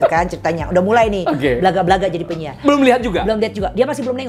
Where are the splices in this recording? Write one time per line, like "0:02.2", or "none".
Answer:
none